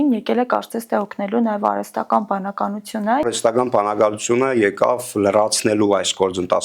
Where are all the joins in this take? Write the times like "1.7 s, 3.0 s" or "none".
3.2 s